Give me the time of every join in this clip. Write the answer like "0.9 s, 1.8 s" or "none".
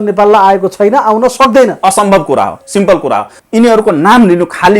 3.4 s